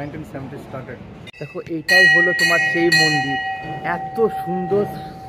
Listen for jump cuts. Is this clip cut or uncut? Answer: cut